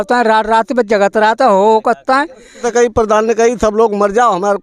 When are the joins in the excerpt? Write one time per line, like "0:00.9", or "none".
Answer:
0:02.6